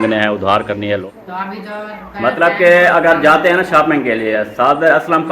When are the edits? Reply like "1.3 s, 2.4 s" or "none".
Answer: 1.0 s